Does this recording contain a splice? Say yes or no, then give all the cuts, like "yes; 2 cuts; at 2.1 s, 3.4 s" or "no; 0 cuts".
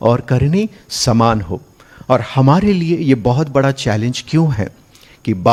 no; 0 cuts